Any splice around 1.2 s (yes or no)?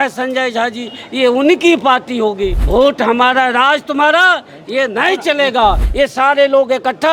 no